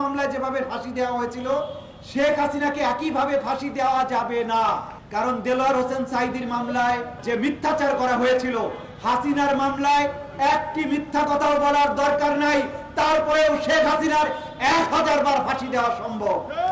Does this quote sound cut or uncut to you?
cut